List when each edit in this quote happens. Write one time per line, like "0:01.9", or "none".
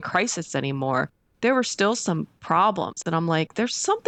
none